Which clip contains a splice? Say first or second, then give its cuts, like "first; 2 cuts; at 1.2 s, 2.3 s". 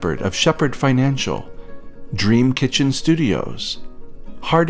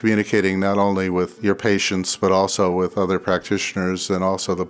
second; 1 cut; at 1.3 s